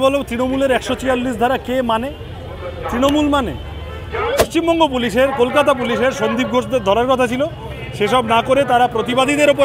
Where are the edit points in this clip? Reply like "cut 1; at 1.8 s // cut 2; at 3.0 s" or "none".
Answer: cut 1; at 4.3 s